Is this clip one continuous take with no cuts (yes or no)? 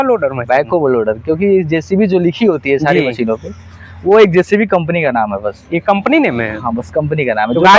yes